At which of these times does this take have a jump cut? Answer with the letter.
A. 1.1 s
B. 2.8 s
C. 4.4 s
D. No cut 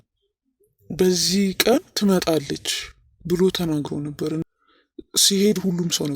C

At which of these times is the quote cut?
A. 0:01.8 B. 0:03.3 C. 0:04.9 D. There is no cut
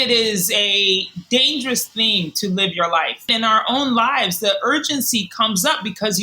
B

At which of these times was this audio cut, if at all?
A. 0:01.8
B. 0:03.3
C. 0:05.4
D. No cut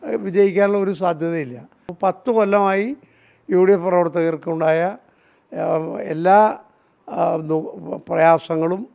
A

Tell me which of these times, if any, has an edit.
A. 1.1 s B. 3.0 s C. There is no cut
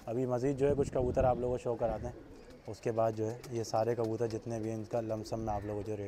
C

